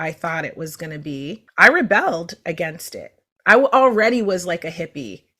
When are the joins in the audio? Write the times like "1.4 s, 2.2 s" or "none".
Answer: 1.4 s